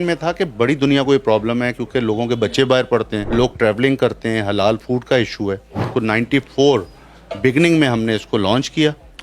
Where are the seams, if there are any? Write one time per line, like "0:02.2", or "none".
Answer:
0:03.2
0:05.9